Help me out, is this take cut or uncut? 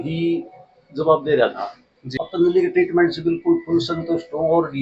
cut